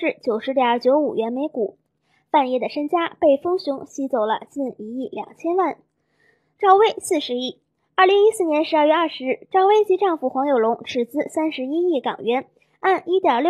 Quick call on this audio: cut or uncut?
uncut